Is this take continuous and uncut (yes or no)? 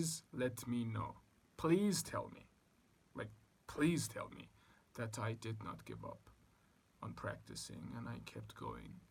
yes